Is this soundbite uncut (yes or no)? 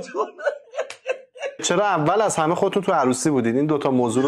no